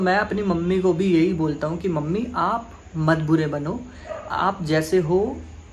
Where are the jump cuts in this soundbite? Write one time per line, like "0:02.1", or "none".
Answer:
none